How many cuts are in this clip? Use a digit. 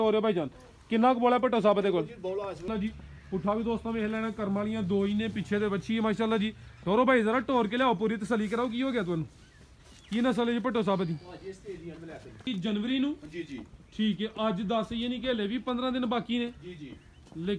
2